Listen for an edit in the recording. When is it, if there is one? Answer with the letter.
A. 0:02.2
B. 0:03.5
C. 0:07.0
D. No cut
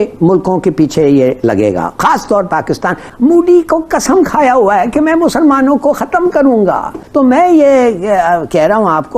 D